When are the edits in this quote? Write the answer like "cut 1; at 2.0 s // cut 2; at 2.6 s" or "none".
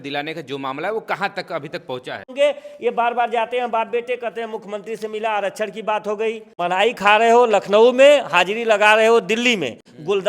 cut 1; at 2.3 s // cut 2; at 6.5 s